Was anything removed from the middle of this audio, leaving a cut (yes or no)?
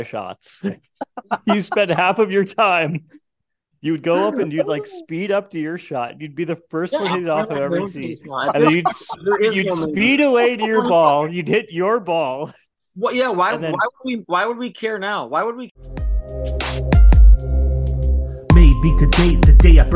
yes